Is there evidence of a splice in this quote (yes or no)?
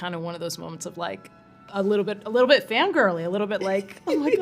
no